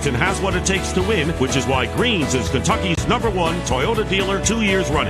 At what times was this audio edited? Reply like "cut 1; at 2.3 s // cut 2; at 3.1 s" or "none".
cut 1; at 3.0 s